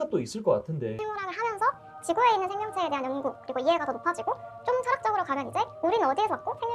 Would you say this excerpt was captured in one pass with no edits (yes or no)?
no